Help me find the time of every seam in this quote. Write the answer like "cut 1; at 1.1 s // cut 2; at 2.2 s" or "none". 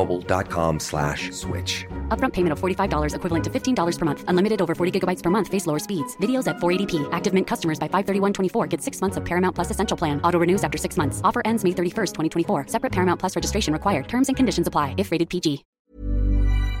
cut 1; at 15.7 s